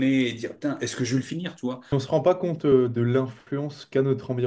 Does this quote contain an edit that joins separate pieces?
yes; 1 cut; at 1.9 s

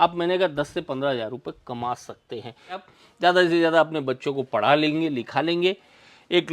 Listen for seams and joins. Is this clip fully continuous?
no; 1 cut; at 2.8 s

